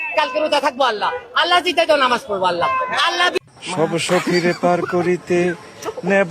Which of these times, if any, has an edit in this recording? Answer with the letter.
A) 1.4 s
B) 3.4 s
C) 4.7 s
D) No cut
B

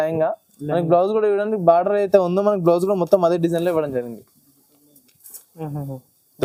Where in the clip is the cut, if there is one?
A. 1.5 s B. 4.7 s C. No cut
C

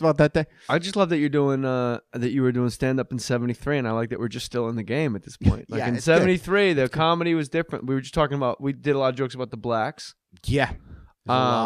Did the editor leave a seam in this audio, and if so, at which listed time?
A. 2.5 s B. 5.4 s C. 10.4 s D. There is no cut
B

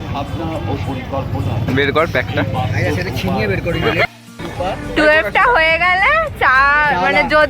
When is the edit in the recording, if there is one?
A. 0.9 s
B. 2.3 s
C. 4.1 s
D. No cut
C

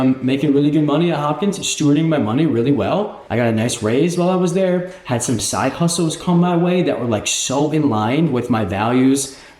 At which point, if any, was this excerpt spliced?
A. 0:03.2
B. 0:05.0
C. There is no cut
A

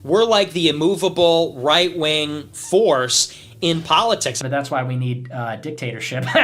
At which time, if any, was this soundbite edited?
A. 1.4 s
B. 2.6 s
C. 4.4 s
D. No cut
C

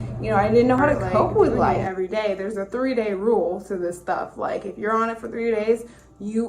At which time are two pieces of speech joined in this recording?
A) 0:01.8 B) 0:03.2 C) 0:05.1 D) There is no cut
A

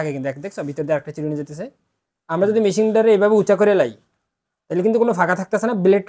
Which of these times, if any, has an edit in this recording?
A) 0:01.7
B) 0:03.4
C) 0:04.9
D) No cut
D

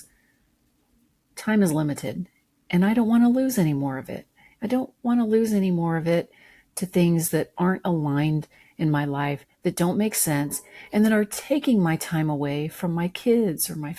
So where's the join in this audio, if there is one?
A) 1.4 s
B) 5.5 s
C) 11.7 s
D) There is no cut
D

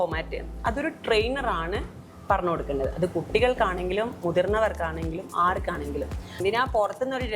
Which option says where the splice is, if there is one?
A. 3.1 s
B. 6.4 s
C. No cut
B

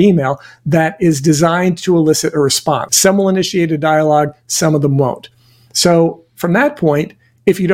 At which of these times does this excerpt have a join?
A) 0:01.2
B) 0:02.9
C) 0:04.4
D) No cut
B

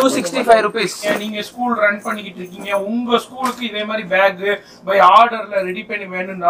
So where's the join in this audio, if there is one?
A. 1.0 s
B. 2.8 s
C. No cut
A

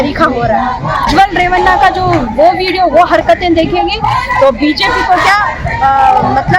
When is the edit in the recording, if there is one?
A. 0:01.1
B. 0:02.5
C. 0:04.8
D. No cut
A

